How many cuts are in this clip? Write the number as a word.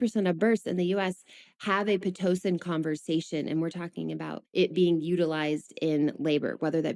zero